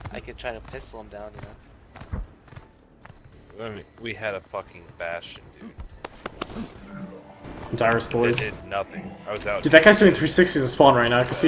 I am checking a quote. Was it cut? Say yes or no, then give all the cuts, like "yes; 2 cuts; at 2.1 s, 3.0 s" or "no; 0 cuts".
no; 0 cuts